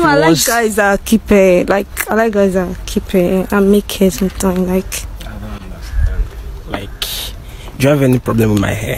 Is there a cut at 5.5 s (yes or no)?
no